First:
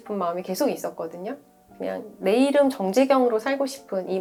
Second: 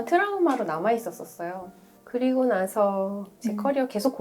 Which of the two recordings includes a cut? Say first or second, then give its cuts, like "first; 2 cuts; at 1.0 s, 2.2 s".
second; 2 cuts; at 1.9 s, 3.3 s